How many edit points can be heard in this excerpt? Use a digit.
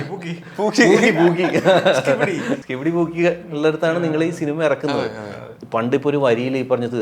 0